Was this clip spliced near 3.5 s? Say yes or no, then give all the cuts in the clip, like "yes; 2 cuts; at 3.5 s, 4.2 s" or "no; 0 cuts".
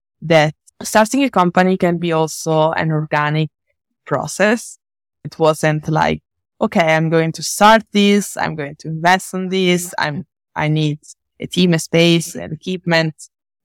no; 1 cut; at 5.3 s